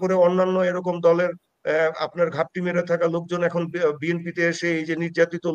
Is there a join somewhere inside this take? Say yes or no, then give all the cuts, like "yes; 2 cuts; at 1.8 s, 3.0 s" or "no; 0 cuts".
no; 0 cuts